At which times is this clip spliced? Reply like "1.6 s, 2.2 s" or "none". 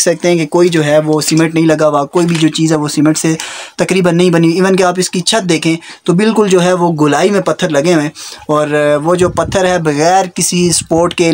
none